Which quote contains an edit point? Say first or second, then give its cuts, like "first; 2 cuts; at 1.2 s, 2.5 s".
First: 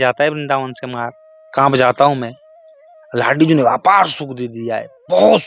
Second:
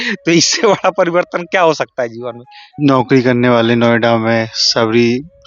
second; 1 cut; at 2.8 s